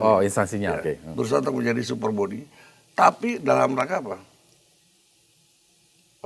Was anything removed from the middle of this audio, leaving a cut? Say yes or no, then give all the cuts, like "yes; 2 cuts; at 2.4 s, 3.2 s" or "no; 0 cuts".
no; 0 cuts